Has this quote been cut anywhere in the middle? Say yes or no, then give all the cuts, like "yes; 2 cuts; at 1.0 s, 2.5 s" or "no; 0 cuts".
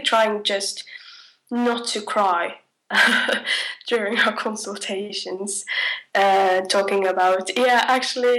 yes; 1 cut; at 2.7 s